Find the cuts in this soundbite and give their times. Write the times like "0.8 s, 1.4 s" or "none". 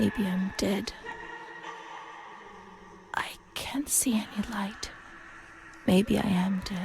1.0 s, 3.0 s